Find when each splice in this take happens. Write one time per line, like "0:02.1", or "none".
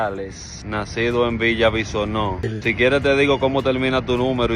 0:02.5